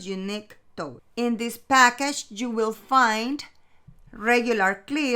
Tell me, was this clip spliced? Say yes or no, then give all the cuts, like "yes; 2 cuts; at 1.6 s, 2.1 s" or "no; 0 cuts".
yes; 1 cut; at 1.0 s